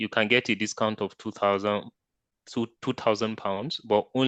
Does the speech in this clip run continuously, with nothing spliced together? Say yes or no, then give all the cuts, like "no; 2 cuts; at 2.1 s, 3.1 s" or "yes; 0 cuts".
yes; 0 cuts